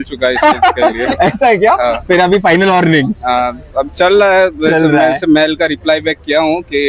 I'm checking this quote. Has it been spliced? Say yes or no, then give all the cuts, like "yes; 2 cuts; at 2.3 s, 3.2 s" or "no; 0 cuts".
no; 0 cuts